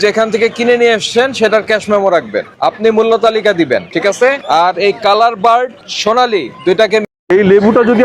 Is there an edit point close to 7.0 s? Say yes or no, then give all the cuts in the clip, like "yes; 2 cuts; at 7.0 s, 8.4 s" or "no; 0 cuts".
yes; 1 cut; at 7.0 s